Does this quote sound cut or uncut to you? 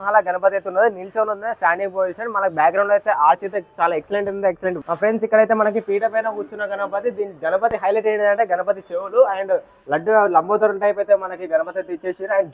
cut